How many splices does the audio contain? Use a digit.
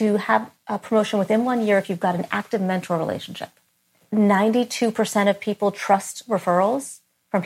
1